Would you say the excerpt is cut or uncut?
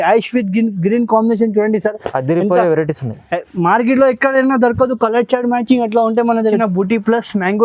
cut